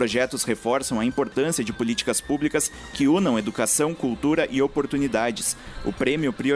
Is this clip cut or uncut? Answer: uncut